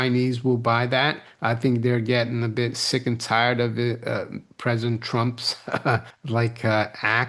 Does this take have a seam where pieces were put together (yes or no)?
yes